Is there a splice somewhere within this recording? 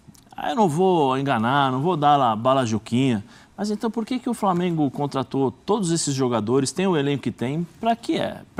no; 0 cuts

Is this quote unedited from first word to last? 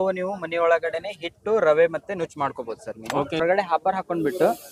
no; 1 cut; at 3.4 s

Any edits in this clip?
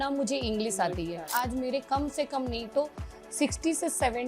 yes; 1 cut; at 1.3 s

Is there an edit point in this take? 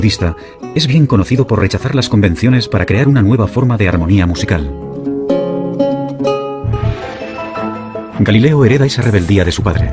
yes; 1 cut; at 3.8 s

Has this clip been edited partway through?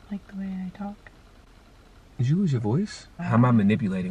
yes; 1 cut; at 3.1 s

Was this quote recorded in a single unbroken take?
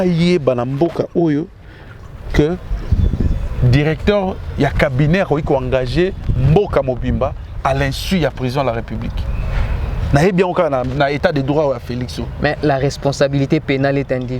yes; 0 cuts

